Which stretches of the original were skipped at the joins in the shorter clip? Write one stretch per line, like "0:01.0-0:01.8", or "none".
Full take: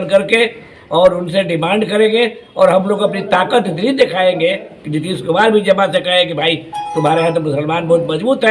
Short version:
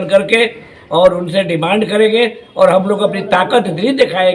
none